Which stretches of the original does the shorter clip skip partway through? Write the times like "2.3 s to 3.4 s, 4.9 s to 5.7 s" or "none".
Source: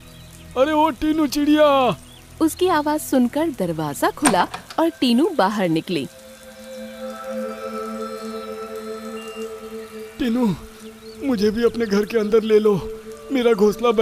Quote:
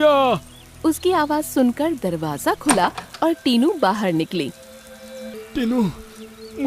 6.9 s to 10.0 s